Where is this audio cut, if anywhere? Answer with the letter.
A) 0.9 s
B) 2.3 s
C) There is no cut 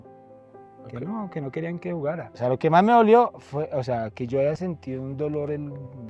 B